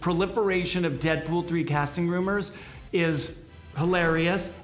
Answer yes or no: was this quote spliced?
no